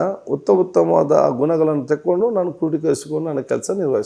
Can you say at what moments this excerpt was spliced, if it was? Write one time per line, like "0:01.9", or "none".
none